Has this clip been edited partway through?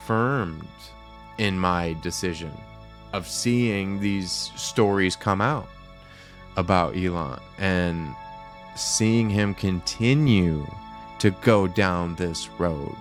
no; 0 cuts

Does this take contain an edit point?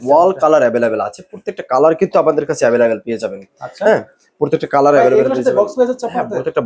no; 0 cuts

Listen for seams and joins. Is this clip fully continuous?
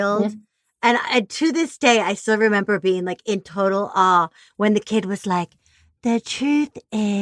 yes; 0 cuts

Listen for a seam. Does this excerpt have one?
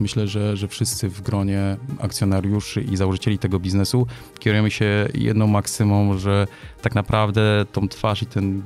no; 0 cuts

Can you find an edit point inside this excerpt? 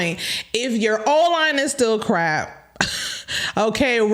no; 0 cuts

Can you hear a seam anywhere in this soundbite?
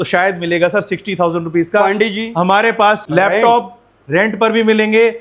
yes; 1 cut; at 3.0 s

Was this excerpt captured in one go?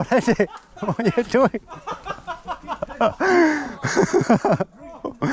yes; 0 cuts

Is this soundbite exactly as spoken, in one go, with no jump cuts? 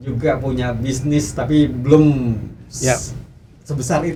yes; 0 cuts

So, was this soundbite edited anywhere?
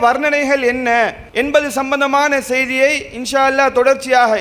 yes; 1 cut; at 1.2 s

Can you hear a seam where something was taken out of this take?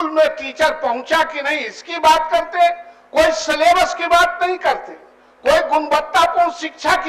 no; 0 cuts

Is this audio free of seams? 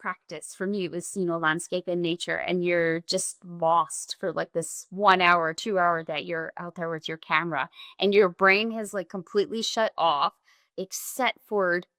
yes; 0 cuts

